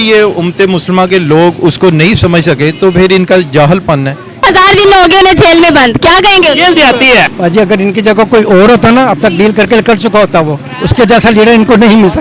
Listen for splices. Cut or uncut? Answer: cut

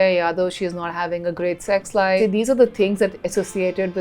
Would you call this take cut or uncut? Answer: cut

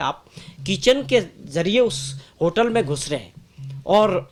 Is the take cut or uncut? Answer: uncut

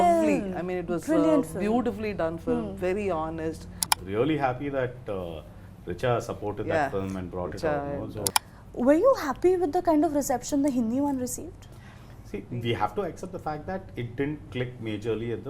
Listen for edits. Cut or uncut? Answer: cut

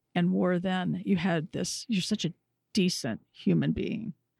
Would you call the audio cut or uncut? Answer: cut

